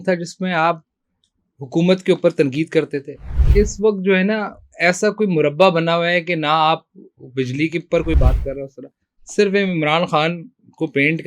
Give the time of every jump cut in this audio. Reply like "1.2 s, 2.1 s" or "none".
none